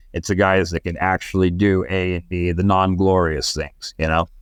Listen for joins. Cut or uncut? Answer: uncut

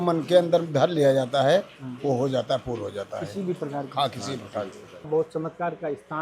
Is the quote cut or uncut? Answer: cut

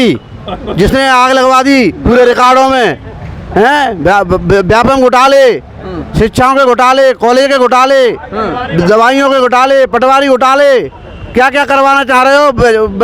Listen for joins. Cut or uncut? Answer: uncut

